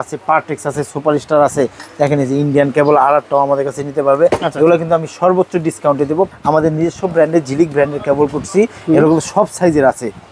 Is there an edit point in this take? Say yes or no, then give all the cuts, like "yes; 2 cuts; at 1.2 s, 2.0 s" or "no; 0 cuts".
yes; 1 cut; at 6.3 s